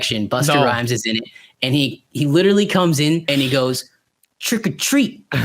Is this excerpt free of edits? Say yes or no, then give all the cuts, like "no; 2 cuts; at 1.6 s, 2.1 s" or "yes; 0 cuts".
no; 1 cut; at 3.2 s